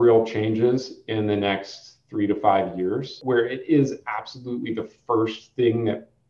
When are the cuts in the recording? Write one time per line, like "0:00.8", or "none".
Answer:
0:03.2